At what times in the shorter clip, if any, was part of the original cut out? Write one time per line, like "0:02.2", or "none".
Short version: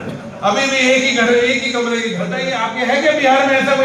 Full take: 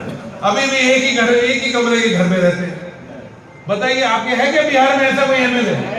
0:02.2